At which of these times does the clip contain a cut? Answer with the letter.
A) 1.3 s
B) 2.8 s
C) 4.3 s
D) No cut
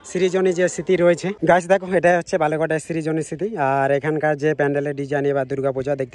A